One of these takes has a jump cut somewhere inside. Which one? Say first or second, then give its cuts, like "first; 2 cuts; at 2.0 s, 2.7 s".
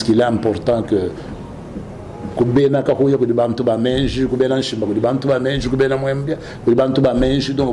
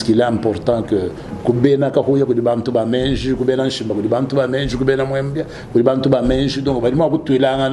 second; 1 cut; at 1.2 s